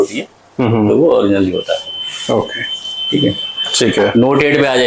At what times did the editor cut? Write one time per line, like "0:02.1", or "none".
none